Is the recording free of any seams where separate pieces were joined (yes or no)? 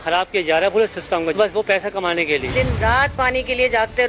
no